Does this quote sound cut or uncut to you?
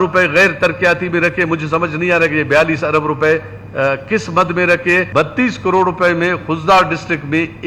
cut